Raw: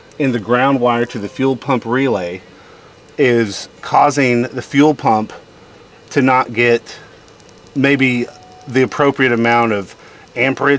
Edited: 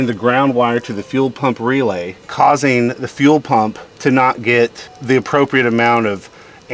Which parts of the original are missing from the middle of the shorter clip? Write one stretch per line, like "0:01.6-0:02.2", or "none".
0:02.4-0:03.7
0:05.4-0:06.0
0:07.0-0:08.5